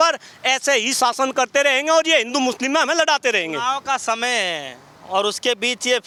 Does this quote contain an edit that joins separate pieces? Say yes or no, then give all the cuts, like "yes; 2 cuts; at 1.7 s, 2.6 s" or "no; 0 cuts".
no; 0 cuts